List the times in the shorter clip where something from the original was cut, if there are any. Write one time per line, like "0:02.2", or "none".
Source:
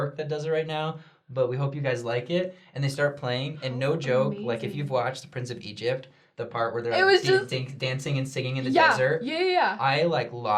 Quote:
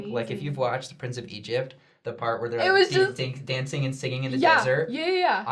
none